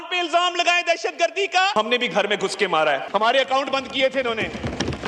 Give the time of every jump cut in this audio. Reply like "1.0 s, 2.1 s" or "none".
1.7 s, 3.0 s